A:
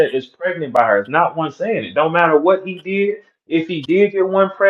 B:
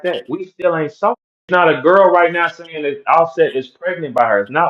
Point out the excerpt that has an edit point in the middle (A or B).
B